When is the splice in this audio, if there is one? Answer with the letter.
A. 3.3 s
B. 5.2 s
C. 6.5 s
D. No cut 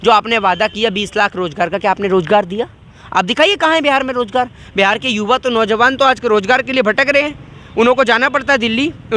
D